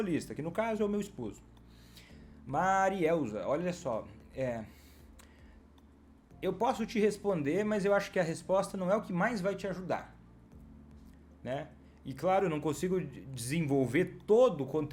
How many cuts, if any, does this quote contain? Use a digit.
0